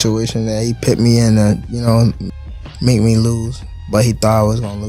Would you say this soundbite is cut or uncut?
cut